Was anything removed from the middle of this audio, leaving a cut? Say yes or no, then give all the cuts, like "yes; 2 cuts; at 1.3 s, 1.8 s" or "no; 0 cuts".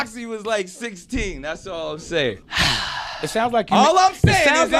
yes; 1 cut; at 2.5 s